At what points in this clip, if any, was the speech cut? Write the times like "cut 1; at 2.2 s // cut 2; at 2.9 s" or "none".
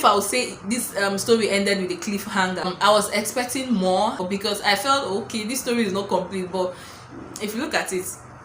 cut 1; at 2.7 s // cut 2; at 4.2 s